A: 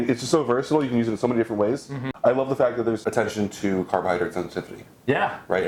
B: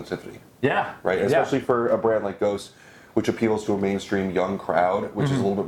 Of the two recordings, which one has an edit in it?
A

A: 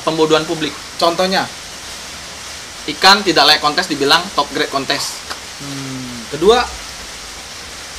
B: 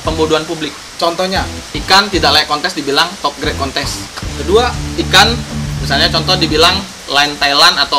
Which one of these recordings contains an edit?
B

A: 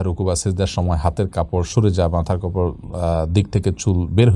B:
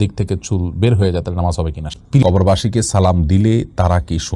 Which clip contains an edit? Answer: B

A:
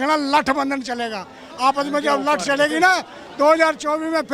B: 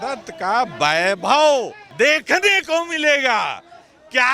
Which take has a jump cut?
B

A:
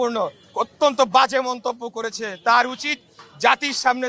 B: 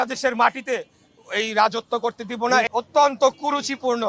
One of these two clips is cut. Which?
B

